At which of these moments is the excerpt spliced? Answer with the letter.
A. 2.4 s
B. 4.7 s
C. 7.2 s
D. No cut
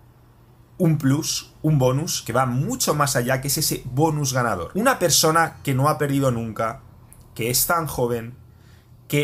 B